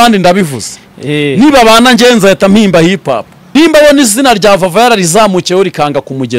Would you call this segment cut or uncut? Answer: cut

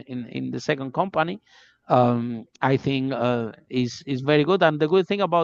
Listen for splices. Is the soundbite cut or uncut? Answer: uncut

